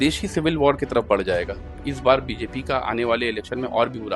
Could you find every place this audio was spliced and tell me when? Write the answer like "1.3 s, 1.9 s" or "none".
1.8 s